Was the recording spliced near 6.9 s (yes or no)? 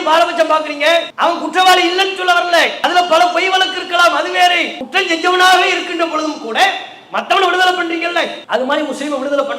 no